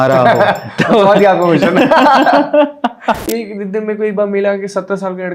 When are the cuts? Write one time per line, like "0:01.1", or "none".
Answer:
0:03.2